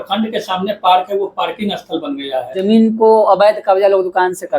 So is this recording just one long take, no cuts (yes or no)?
no